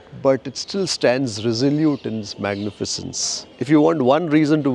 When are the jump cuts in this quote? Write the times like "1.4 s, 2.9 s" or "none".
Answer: 3.4 s